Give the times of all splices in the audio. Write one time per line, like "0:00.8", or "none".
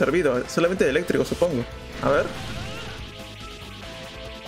none